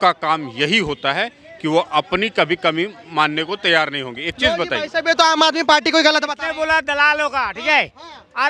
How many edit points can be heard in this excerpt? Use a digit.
0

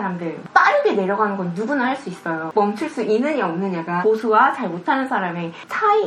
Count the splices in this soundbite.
2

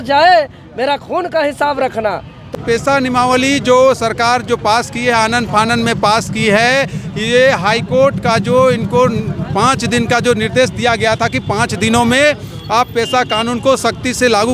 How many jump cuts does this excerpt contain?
1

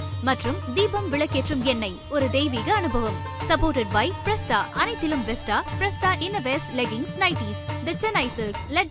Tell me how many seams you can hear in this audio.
0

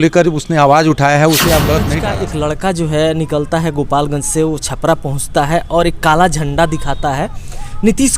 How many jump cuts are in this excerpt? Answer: 1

